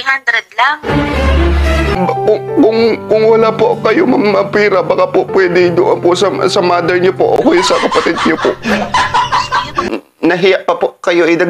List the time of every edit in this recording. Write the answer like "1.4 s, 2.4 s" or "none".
2.0 s, 9.7 s